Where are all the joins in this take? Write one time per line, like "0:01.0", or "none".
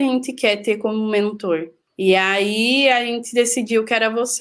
0:01.8

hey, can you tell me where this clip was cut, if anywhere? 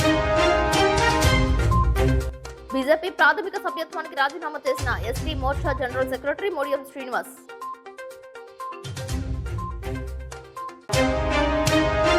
0:02.1

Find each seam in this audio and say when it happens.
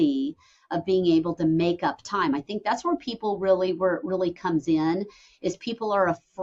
none

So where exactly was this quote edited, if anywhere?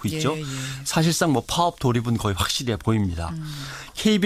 none

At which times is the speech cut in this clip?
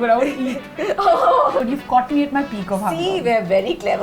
0:01.6

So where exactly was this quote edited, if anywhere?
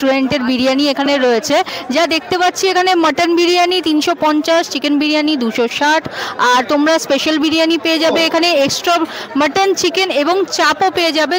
none

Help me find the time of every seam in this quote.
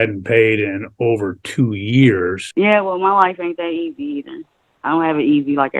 0:02.4

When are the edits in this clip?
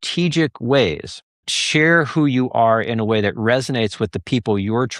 0:01.6

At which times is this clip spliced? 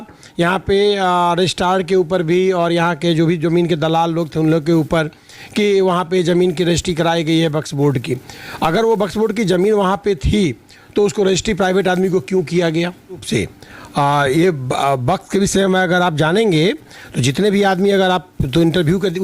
0:13.2

